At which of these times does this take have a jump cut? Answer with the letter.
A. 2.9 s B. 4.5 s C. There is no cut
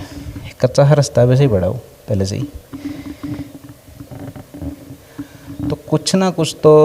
C